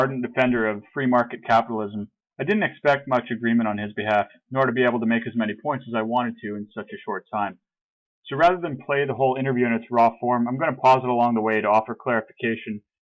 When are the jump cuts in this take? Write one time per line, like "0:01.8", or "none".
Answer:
none